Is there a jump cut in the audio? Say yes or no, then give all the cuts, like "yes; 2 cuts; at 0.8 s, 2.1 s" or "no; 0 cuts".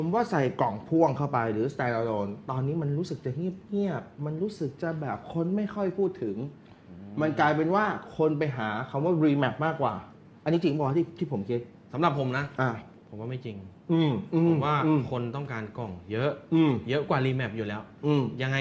no; 0 cuts